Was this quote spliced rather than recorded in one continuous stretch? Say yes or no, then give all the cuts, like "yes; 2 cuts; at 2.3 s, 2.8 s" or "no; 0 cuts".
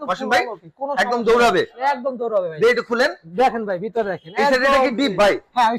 no; 0 cuts